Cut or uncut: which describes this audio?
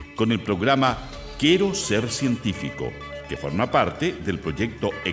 uncut